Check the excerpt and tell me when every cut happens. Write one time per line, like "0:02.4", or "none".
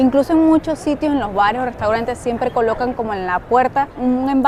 none